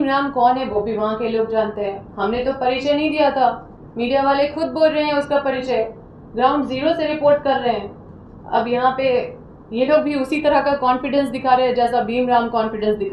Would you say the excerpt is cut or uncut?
uncut